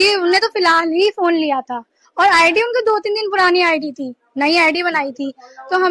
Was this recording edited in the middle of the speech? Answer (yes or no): no